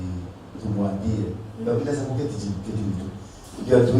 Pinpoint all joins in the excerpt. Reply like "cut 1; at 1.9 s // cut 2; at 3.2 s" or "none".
none

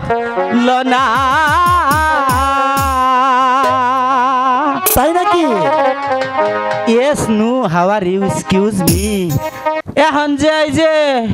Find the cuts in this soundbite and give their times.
cut 1; at 9.8 s

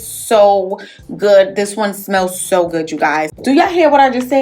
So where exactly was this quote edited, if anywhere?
cut 1; at 3.3 s

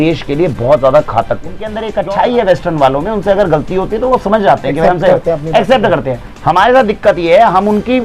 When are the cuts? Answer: cut 1; at 1.8 s

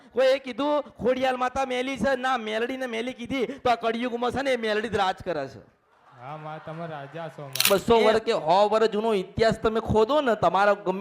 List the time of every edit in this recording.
cut 1; at 7.7 s

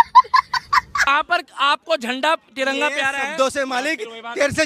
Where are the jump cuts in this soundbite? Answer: cut 1; at 1.0 s

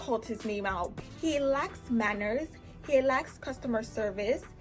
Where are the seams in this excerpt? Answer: cut 1; at 0.9 s

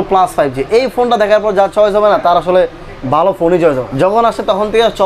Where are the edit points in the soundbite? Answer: cut 1; at 3.9 s

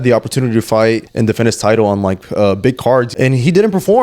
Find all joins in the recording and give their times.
cut 1; at 1.1 s // cut 2; at 3.1 s

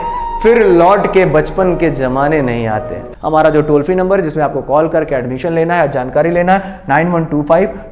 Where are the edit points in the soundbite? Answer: cut 1; at 3.0 s

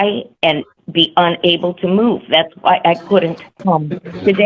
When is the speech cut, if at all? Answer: cut 1; at 3.5 s

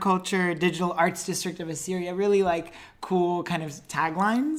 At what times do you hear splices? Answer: none

